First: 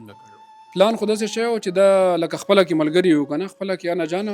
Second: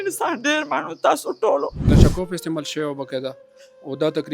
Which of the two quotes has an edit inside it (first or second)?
second